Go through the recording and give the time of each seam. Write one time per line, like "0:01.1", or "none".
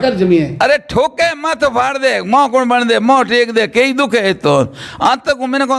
none